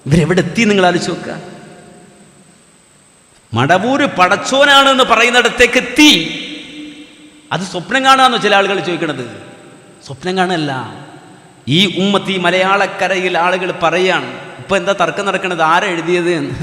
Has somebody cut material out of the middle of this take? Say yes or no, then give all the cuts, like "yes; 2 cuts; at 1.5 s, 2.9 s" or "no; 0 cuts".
no; 0 cuts